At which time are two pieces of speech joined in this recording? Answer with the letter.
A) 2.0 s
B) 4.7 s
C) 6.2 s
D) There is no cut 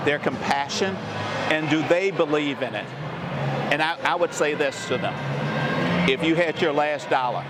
D